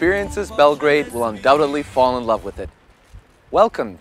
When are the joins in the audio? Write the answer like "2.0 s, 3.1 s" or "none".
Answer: none